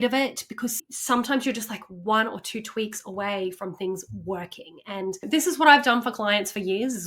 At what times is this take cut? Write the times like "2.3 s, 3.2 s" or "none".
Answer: 0.8 s, 5.2 s